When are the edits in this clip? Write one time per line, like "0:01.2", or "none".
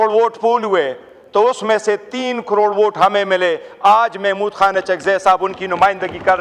none